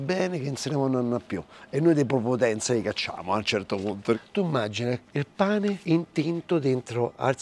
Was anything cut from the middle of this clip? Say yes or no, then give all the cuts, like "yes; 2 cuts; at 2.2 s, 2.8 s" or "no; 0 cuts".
yes; 2 cuts; at 4.2 s, 5.8 s